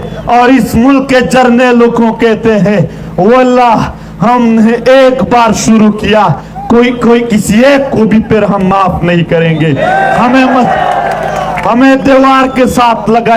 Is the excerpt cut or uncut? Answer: uncut